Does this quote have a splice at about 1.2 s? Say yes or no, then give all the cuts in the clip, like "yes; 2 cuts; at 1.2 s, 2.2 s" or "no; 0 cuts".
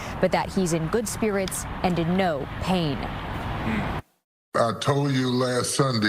no; 1 cut; at 3.0 s